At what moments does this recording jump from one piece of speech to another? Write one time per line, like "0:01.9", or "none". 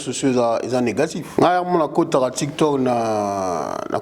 0:01.2